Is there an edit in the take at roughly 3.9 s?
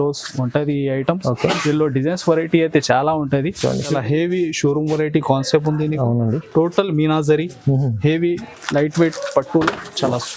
yes; 1 cut; at 3.9 s

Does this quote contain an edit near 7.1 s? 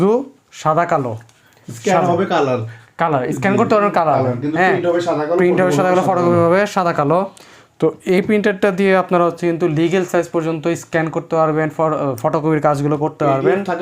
no; 0 cuts

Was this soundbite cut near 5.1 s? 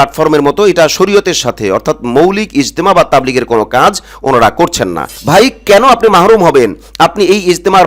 yes; 1 cut; at 5.1 s

